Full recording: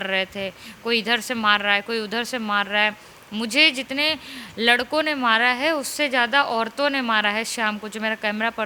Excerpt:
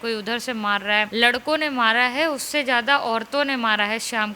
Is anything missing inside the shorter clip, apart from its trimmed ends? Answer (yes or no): yes